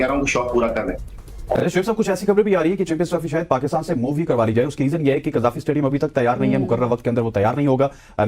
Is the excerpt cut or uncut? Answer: cut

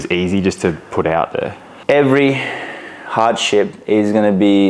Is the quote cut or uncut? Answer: cut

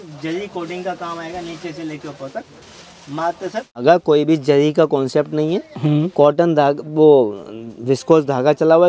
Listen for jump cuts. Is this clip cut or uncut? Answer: cut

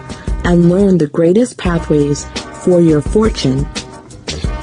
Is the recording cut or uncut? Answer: cut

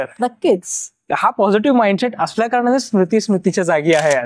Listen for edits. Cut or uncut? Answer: uncut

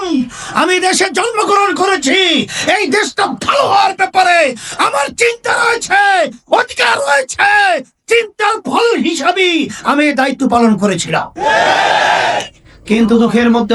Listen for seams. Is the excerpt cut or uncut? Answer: uncut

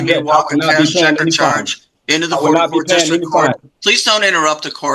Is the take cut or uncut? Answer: uncut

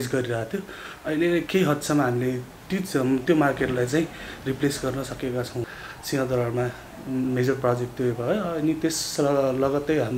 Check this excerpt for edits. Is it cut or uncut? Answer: cut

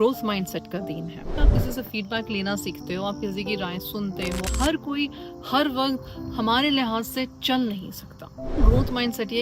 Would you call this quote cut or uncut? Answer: cut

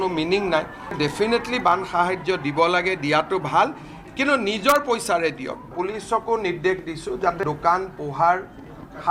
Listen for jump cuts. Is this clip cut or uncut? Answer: cut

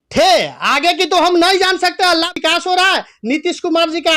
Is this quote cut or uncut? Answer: cut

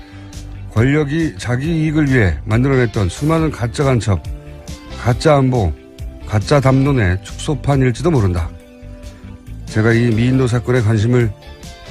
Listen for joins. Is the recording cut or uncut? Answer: uncut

